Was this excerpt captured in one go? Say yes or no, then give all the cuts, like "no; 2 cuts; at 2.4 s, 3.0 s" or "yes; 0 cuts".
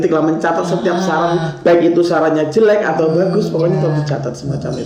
yes; 0 cuts